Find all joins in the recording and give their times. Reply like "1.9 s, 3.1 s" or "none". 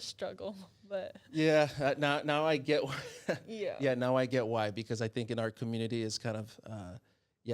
none